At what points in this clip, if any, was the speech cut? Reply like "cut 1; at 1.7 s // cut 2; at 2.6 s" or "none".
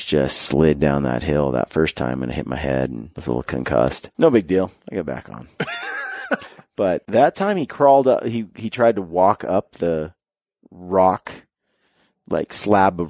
cut 1; at 3.1 s // cut 2; at 4.0 s // cut 3; at 4.8 s // cut 4; at 6.6 s